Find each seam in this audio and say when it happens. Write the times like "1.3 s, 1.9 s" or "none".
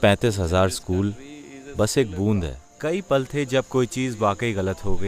2.6 s